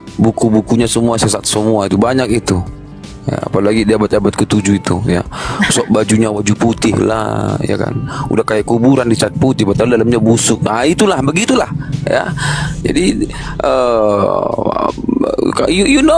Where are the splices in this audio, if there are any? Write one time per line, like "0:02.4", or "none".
none